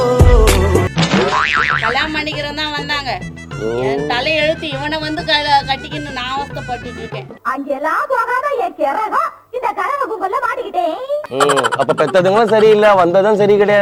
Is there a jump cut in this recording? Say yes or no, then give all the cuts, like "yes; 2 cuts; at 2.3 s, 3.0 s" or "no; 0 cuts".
no; 0 cuts